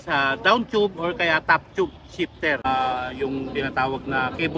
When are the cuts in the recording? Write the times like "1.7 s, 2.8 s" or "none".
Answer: 2.7 s